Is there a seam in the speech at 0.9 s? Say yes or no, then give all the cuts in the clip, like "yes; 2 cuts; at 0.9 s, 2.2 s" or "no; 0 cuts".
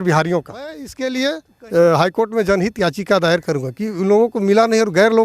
yes; 1 cut; at 0.9 s